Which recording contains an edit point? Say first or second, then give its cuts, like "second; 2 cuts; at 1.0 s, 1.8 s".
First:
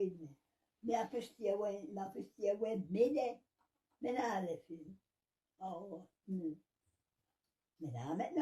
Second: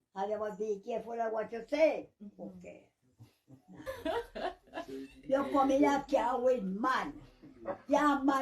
second; 1 cut; at 3.8 s